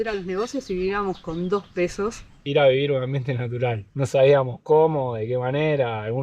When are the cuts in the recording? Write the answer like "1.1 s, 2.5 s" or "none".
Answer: 2.4 s

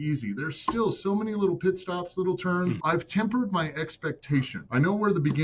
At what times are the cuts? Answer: 2.8 s

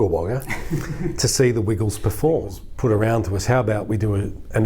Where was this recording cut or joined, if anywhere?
2.6 s

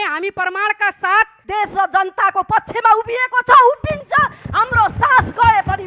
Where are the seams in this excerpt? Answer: 1.4 s

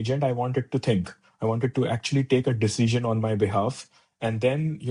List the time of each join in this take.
none

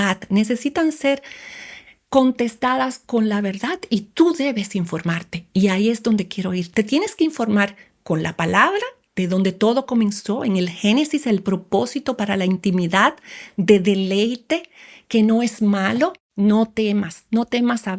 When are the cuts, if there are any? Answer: 16.2 s

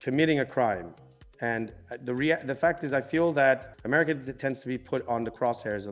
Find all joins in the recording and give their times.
3.7 s

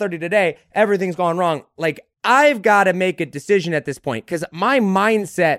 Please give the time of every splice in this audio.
2.1 s

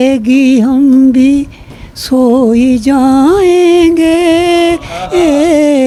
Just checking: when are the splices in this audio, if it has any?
none

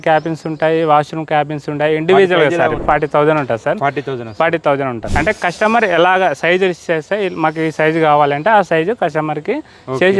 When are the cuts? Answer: 2.8 s, 5.1 s

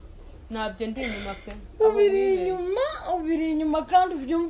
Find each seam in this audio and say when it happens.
none

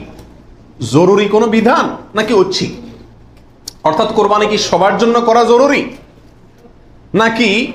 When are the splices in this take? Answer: none

